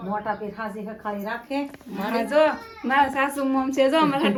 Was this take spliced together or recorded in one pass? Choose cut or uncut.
uncut